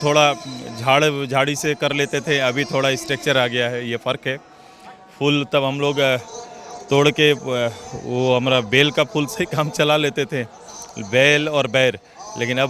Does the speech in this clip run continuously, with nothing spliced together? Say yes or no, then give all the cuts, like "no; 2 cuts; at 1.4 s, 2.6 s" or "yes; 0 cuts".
yes; 0 cuts